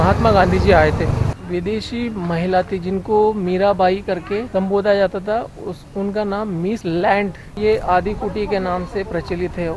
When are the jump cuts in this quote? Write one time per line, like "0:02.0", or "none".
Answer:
0:01.3
0:04.5
0:06.8
0:07.6